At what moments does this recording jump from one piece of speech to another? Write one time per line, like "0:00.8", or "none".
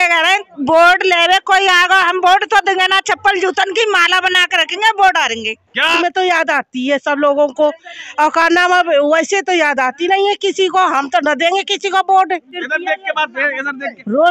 0:06.0
0:12.6